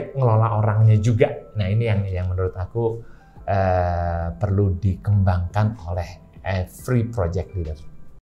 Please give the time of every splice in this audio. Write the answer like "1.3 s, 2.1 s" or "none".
none